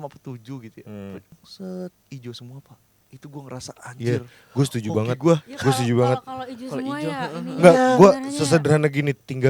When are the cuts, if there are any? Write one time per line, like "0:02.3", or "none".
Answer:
0:01.3